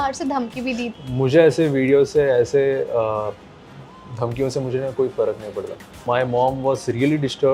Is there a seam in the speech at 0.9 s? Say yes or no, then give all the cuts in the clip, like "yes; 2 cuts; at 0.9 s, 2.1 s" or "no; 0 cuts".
yes; 2 cuts; at 0.9 s, 6.1 s